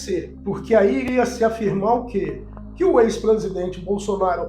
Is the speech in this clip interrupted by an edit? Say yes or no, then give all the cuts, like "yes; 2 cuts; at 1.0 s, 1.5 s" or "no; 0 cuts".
no; 0 cuts